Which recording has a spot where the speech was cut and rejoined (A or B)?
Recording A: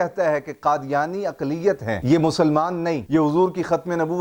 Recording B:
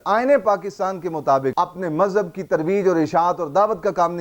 B